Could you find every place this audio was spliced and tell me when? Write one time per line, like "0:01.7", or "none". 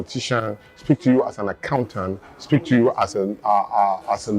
none